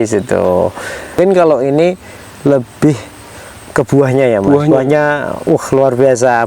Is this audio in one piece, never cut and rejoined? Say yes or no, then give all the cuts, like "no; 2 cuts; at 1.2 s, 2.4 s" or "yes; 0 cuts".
no; 1 cut; at 1.2 s